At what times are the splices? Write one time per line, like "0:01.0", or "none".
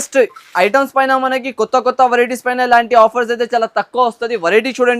none